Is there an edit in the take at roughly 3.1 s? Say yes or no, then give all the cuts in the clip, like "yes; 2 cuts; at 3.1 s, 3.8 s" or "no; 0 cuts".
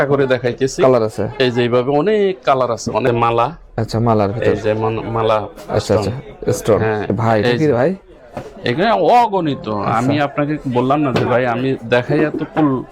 yes; 2 cuts; at 3.1 s, 7.1 s